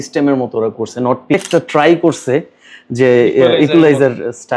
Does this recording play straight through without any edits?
no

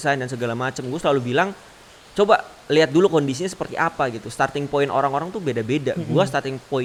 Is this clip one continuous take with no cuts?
yes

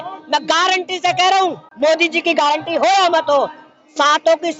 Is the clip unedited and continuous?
no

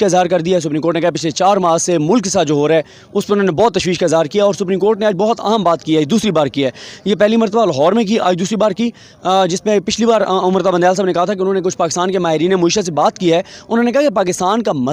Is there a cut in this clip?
no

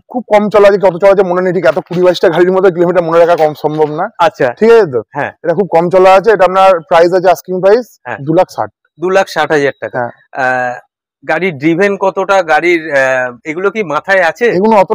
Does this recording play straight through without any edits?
yes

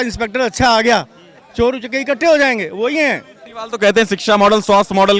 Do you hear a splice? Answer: yes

